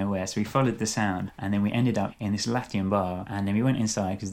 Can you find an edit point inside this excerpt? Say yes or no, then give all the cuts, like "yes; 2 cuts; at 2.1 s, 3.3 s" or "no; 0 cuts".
yes; 3 cuts; at 1.3 s, 2.1 s, 3.2 s